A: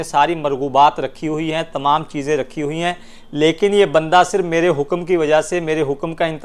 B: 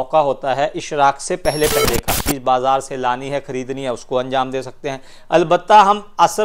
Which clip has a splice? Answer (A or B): B